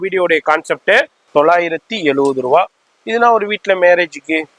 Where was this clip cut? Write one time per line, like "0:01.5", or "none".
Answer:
0:01.2